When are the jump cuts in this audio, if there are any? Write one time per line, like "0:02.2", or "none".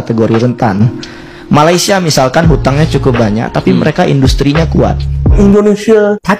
0:05.3